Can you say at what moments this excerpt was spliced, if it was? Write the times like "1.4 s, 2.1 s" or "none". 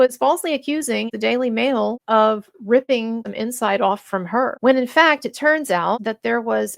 2.0 s, 3.3 s, 4.5 s, 6.0 s